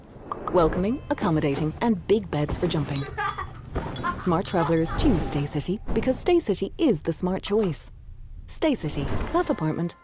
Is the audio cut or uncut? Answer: uncut